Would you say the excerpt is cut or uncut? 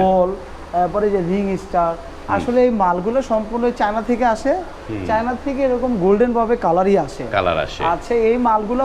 uncut